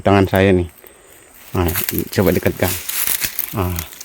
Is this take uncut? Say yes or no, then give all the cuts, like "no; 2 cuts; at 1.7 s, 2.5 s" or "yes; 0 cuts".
yes; 0 cuts